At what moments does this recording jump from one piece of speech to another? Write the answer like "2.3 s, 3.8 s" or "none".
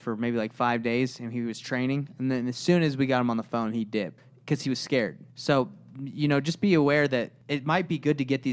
4.2 s, 5.3 s, 7.4 s